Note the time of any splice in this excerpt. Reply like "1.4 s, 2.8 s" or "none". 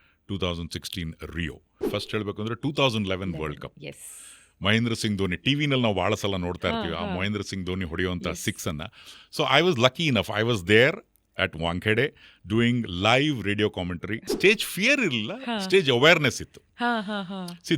1.8 s, 14.3 s